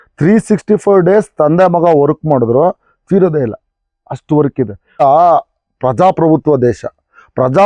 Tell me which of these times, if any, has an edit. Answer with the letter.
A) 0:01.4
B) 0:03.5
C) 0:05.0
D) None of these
C